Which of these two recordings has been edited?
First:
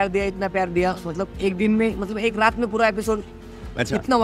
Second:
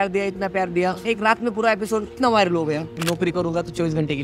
second; 3 cuts; at 1.0 s, 2.1 s, 3.0 s

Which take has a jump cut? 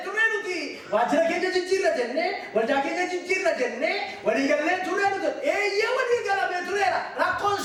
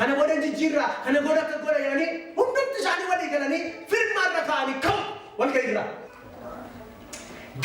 second; 1 cut; at 6.1 s

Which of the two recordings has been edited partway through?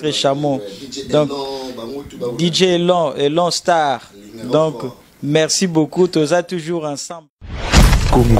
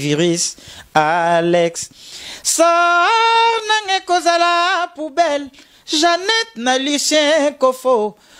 first; 1 cut; at 7.4 s

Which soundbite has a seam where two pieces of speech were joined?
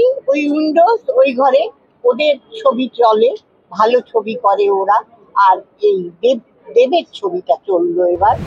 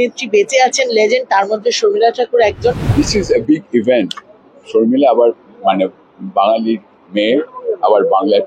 second; 1 cut; at 2.8 s

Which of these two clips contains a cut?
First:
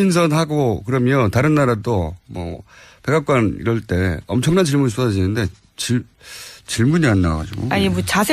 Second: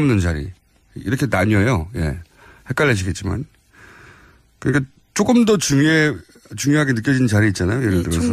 second; 1 cut; at 1.9 s

